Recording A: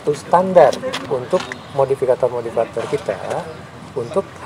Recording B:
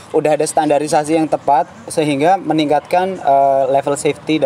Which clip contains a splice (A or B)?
A